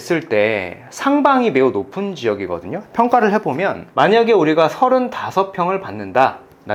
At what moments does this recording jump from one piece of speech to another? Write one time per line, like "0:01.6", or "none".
none